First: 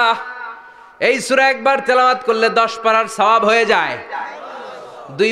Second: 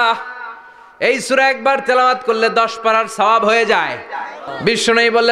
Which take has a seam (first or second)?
second